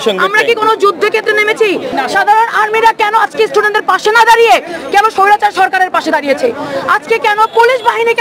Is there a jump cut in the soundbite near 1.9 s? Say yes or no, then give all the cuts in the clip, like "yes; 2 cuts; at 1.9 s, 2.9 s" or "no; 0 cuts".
yes; 1 cut; at 1.9 s